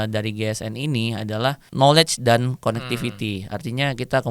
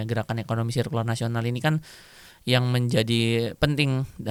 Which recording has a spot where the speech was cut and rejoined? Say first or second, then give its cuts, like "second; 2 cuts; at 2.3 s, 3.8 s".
first; 1 cut; at 1.7 s